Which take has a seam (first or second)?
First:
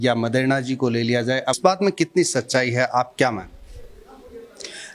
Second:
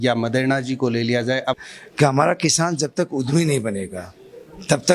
second